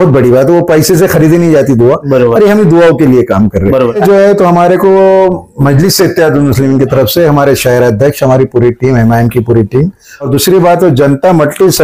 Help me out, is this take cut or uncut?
cut